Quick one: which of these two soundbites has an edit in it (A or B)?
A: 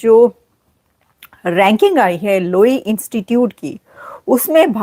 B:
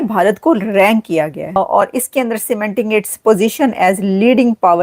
B